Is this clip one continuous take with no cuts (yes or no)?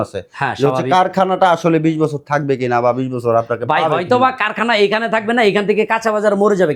yes